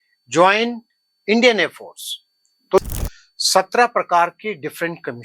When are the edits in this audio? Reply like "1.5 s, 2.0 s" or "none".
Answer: 2.8 s